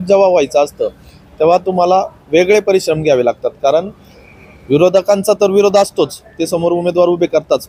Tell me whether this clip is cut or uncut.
uncut